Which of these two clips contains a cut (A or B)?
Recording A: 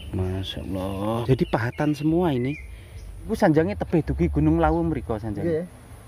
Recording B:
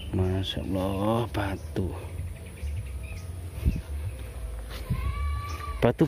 A